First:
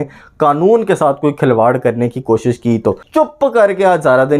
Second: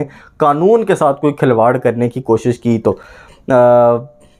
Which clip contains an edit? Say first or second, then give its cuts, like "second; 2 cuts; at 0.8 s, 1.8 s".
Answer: first; 1 cut; at 3.0 s